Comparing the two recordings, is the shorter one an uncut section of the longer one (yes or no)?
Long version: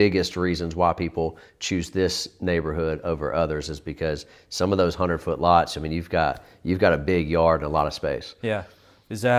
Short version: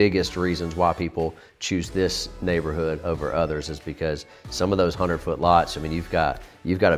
yes